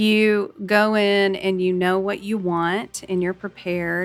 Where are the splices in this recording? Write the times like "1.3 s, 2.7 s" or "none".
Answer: none